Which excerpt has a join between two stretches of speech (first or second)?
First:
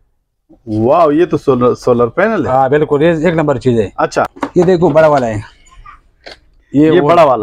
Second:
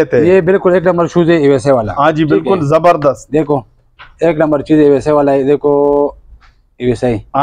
first